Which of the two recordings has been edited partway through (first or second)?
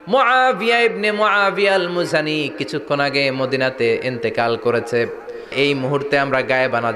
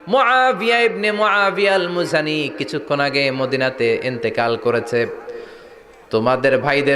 first